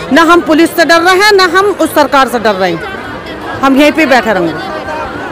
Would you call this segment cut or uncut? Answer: uncut